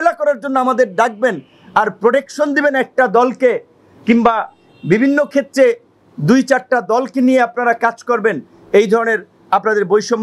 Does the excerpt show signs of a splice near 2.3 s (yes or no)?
no